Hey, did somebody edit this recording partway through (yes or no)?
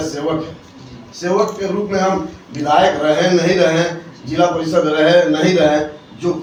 no